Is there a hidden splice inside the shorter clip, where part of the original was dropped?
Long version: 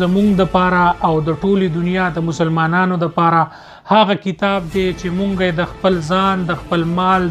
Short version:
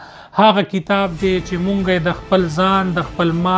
no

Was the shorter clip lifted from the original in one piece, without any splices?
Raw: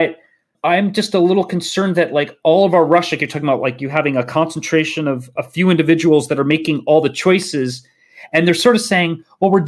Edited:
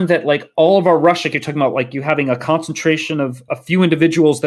yes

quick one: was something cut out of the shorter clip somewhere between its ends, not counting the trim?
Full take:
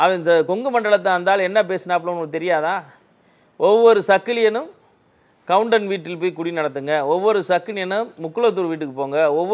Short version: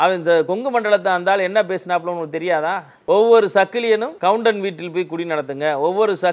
yes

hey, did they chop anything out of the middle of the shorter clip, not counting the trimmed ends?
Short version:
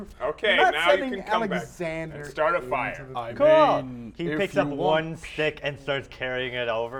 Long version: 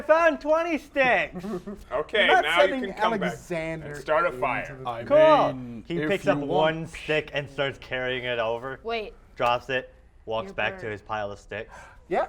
no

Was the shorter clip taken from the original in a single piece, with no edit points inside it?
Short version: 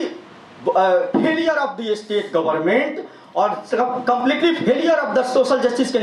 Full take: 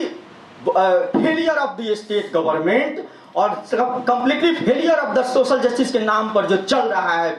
yes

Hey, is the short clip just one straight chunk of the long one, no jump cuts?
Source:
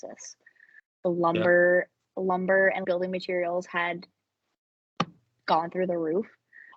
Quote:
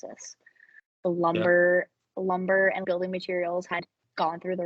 no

